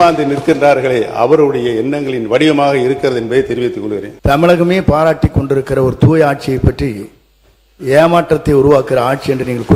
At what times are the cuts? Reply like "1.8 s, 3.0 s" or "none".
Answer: 4.1 s